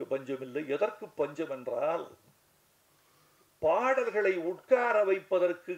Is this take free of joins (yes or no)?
yes